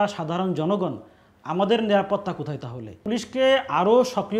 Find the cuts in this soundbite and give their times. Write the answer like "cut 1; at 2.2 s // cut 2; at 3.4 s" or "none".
cut 1; at 3.0 s